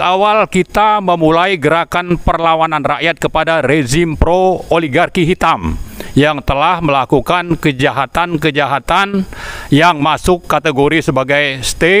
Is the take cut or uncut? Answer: uncut